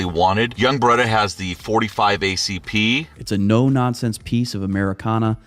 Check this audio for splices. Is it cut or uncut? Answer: cut